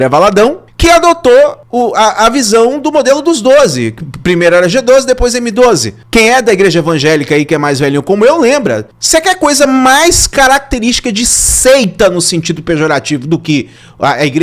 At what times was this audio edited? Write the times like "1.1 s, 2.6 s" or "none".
none